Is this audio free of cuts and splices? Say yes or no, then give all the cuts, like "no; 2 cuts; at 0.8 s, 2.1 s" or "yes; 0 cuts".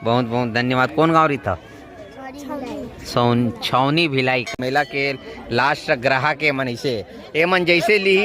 no; 1 cut; at 4.5 s